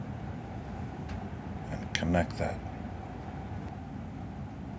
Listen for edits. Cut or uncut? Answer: cut